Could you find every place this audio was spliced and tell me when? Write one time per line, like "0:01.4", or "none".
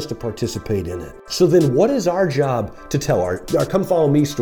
0:01.2
0:03.4